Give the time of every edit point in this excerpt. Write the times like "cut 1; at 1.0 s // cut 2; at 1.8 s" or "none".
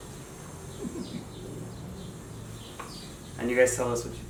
none